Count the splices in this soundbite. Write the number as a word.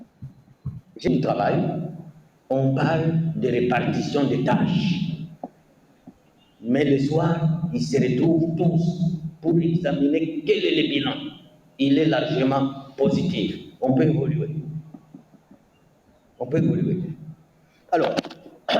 one